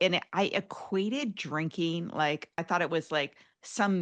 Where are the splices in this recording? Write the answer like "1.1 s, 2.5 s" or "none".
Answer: 2.6 s